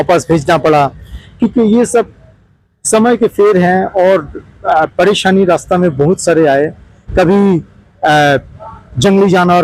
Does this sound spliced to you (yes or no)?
no